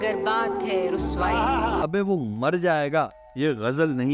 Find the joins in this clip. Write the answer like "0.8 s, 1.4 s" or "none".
1.9 s